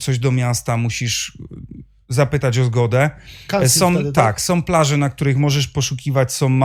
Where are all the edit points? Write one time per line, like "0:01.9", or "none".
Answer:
none